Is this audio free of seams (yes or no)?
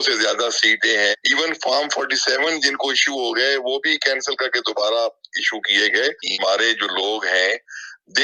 no